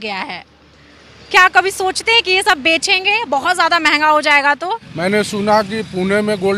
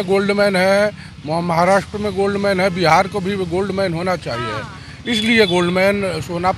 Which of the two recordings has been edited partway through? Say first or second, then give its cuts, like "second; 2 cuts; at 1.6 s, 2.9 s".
first; 1 cut; at 4.8 s